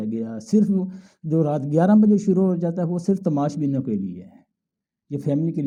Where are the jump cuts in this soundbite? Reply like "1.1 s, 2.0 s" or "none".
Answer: none